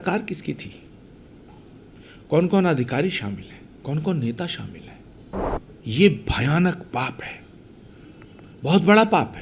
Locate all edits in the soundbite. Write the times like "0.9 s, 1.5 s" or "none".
5.5 s